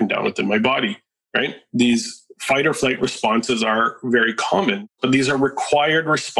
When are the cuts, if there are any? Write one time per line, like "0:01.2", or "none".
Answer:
0:04.8

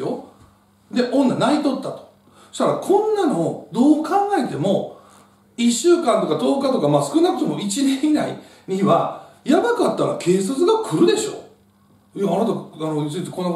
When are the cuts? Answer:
none

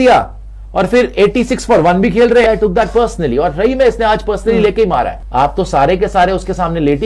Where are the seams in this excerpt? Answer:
0:02.5
0:05.2

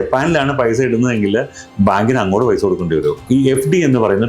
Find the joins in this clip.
0:03.2

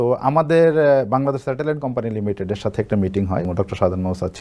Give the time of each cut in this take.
0:03.5

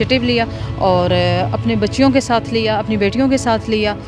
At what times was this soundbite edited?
none

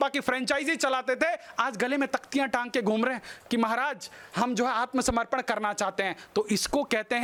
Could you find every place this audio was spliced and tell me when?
none

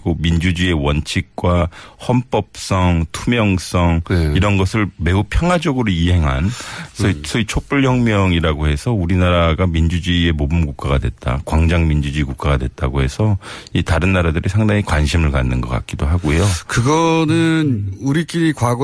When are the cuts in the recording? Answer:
0:15.5

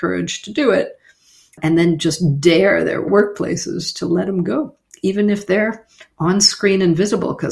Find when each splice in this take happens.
none

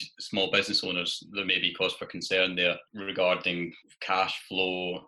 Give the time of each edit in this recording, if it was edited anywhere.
0:02.9
0:03.9

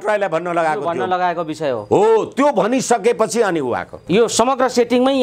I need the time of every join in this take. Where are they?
0:03.9

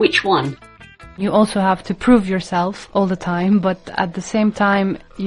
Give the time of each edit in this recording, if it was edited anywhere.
0:01.2
0:01.8

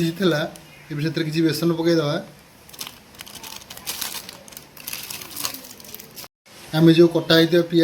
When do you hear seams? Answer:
none

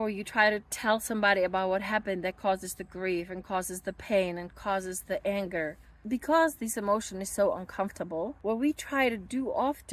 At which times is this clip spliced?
0:05.9
0:08.4

